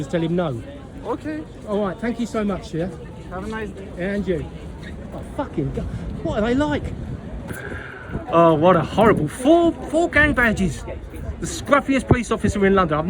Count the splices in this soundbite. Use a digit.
1